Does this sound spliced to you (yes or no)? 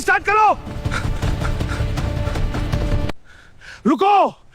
yes